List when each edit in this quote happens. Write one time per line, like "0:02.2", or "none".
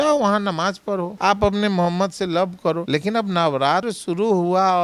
0:01.1
0:02.8
0:03.9